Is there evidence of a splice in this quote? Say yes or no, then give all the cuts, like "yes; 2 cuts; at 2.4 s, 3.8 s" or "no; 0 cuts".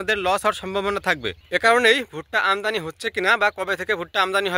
yes; 1 cut; at 1.3 s